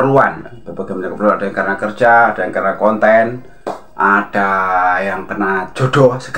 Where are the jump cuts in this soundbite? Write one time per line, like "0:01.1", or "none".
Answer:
none